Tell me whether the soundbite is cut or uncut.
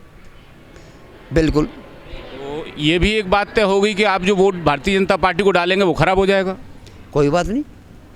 uncut